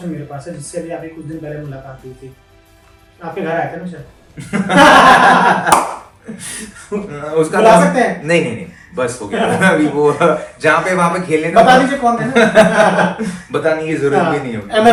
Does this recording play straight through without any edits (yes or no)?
yes